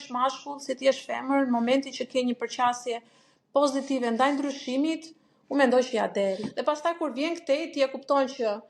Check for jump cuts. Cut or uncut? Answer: cut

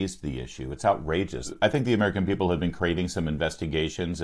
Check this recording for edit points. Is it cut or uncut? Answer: cut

